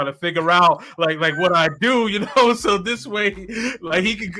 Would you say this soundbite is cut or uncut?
uncut